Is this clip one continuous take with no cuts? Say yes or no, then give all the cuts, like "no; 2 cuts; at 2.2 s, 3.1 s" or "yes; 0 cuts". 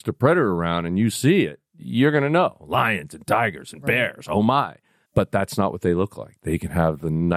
yes; 0 cuts